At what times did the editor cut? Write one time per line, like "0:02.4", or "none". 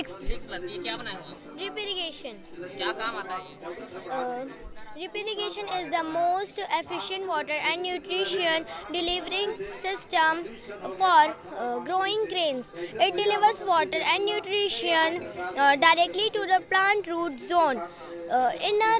none